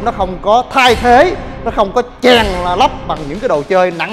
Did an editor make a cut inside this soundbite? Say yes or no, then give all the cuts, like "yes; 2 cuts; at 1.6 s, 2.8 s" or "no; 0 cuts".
no; 0 cuts